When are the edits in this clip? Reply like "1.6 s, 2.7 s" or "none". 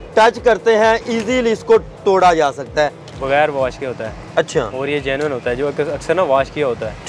3.2 s